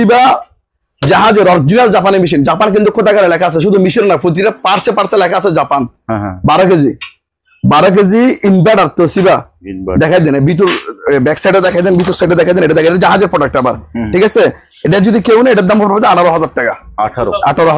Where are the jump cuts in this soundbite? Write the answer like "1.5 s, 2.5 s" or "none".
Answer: none